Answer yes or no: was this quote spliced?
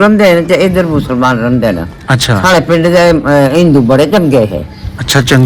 no